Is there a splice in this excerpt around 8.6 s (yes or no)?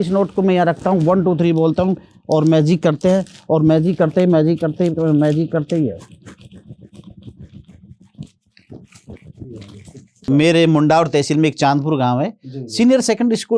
no